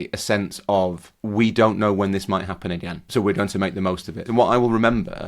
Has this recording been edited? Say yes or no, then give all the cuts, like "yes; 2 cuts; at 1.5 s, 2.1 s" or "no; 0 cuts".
yes; 3 cuts; at 1.1 s, 2.9 s, 4.3 s